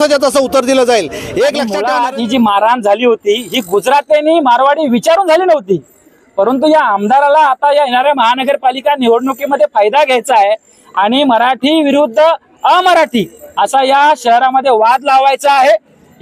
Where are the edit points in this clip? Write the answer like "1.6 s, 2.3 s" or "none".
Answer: 1.8 s